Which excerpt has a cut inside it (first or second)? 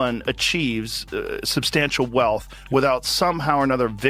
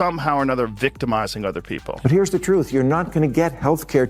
second